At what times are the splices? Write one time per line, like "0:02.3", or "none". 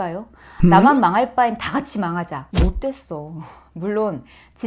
none